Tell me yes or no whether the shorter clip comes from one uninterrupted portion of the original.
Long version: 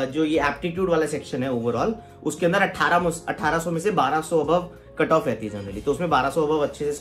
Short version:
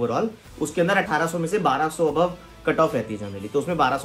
no